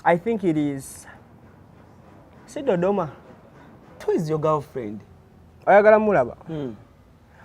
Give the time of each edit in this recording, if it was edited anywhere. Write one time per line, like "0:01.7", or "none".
0:04.0